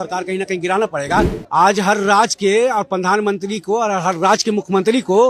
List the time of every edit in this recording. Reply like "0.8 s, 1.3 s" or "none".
1.4 s